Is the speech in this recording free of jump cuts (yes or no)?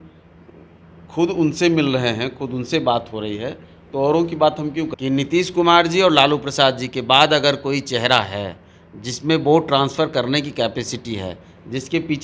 no